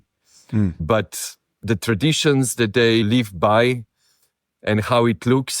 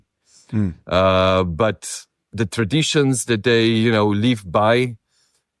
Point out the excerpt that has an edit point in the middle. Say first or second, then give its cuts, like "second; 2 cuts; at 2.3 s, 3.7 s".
first; 2 cuts; at 0.8 s, 3.0 s